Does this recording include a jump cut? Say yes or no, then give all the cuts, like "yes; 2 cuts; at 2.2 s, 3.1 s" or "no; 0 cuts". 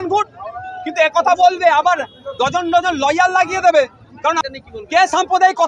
yes; 1 cut; at 4.4 s